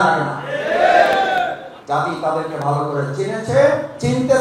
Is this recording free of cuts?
no; 1 cut; at 1.7 s

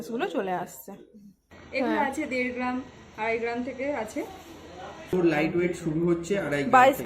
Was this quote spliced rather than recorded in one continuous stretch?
yes; 2 cuts; at 1.6 s, 5.1 s

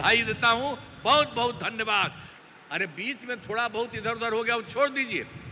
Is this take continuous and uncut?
no; 1 cut; at 2.3 s

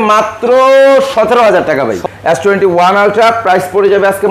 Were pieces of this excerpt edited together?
yes; 1 cut; at 2.0 s

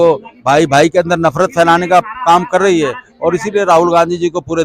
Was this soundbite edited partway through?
no; 0 cuts

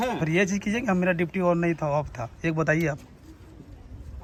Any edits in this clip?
no; 0 cuts

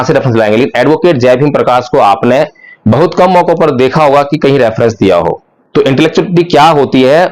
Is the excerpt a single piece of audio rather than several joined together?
no; 1 cut; at 5.5 s

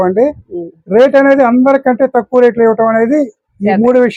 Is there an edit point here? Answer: no; 0 cuts

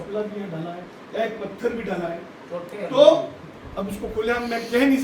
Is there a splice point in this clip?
yes; 1 cut; at 3.4 s

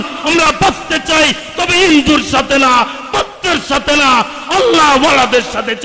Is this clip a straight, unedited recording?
yes; 0 cuts

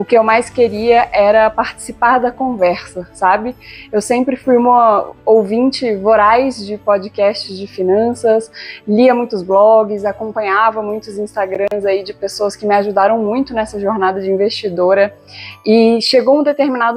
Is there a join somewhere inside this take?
no; 0 cuts

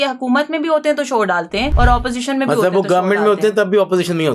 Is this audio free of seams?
no; 1 cut; at 1.7 s

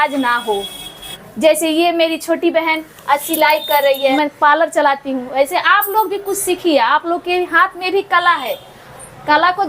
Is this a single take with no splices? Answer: no; 2 cuts; at 1.1 s, 4.1 s

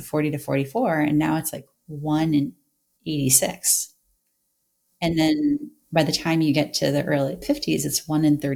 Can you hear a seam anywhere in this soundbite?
no; 0 cuts

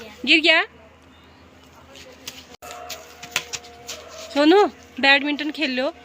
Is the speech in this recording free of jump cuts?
no; 1 cut; at 2.6 s

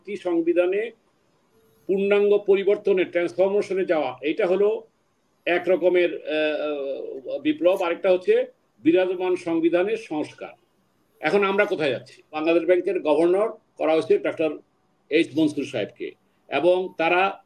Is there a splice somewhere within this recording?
yes; 1 cut; at 12.3 s

